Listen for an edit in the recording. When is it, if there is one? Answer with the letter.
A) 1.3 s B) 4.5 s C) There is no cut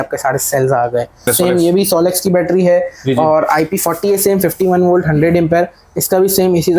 A